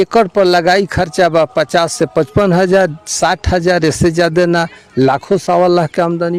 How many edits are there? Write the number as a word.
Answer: zero